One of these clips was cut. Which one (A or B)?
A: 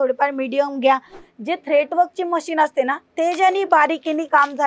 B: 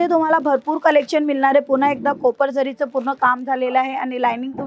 A